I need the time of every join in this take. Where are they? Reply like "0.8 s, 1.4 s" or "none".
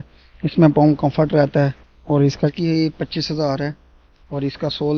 2.5 s